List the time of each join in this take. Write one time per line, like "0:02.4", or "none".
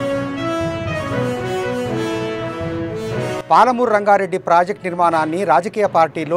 none